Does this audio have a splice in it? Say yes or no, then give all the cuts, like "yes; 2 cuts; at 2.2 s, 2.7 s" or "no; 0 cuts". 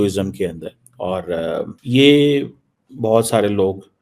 yes; 1 cut; at 1.8 s